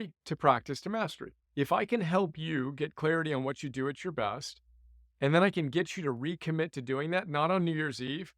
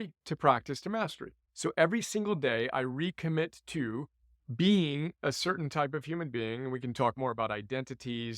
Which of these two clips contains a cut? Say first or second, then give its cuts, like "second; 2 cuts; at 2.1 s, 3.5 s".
first; 1 cut; at 1.4 s